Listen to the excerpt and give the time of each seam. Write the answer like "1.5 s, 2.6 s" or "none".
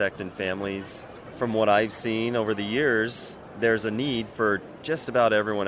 1.3 s